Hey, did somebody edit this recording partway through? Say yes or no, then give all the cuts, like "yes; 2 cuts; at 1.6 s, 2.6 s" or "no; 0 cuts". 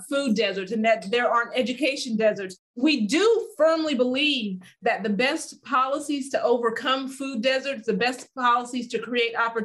no; 0 cuts